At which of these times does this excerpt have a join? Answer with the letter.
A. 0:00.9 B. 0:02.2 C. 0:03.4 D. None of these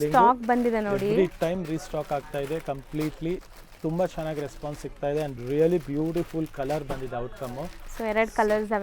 D